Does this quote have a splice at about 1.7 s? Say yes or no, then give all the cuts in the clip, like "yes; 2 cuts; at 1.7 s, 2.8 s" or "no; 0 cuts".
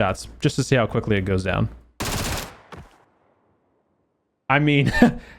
no; 1 cut; at 3.1 s